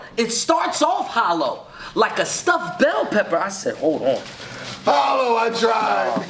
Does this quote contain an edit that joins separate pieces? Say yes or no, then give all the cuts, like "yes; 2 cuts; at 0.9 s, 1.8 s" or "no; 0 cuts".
no; 0 cuts